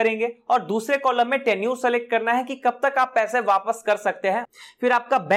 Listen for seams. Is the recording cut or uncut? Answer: cut